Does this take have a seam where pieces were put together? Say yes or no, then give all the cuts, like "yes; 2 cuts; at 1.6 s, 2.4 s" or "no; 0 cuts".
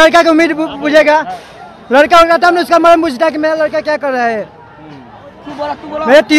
no; 0 cuts